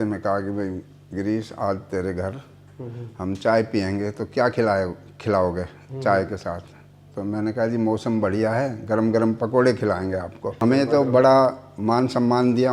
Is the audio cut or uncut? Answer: cut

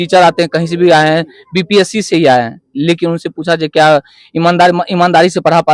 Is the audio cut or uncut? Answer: uncut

